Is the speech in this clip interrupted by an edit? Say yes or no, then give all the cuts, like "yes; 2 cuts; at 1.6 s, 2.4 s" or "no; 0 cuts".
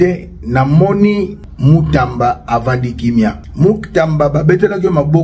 yes; 2 cuts; at 1.4 s, 3.4 s